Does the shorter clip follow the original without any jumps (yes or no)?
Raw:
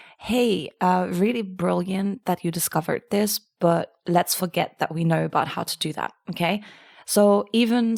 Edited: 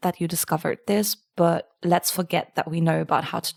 yes